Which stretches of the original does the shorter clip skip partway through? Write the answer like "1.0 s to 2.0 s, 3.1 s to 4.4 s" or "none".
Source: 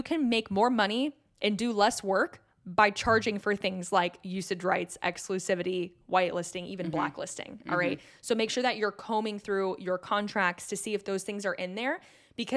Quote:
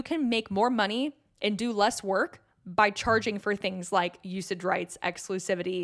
none